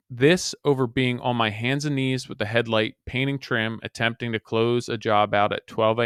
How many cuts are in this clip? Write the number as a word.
zero